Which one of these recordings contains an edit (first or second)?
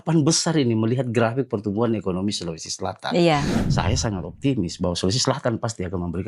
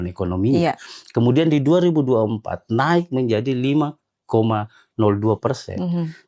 first